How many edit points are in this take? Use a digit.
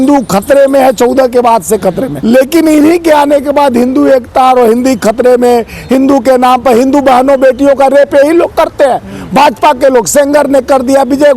1